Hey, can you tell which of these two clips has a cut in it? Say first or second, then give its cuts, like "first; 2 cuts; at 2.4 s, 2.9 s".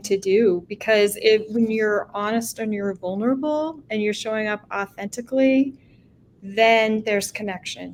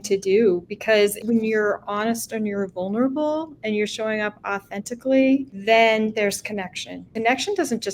second; 3 cuts; at 1.2 s, 5.5 s, 7.1 s